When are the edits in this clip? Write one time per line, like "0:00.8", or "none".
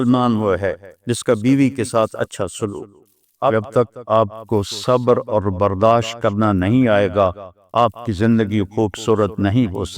0:03.5